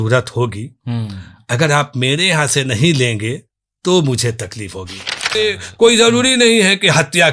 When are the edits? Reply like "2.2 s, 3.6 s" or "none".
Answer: 5.3 s